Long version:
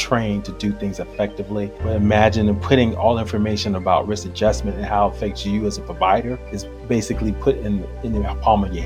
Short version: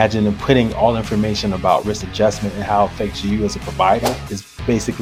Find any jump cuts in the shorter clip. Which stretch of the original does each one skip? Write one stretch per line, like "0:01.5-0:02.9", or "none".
none